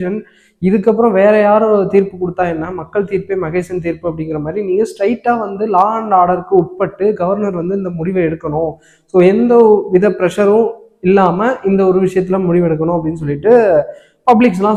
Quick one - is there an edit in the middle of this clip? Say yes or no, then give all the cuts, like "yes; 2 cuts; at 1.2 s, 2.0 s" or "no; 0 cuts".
no; 0 cuts